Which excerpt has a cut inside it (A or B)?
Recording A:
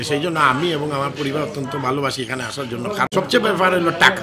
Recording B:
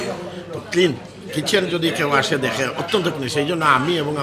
A